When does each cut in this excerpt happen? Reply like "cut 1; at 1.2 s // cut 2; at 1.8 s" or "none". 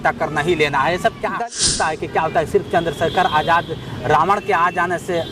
cut 1; at 1.2 s